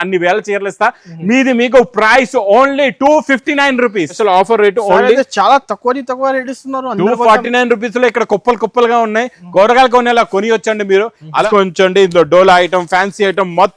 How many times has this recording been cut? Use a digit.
2